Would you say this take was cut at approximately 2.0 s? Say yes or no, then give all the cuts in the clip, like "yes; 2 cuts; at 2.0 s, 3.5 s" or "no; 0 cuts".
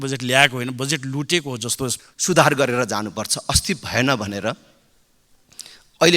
yes; 1 cut; at 2.0 s